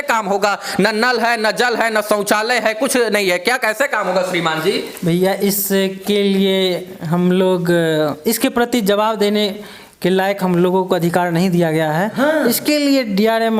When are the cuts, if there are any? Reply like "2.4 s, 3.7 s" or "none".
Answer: none